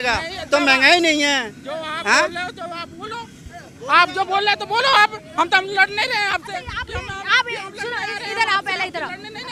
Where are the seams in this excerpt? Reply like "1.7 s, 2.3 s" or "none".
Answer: none